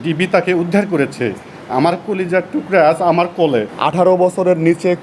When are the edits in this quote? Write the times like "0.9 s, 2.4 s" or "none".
3.7 s